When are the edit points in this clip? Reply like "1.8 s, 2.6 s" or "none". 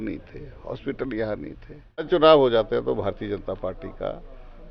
2.1 s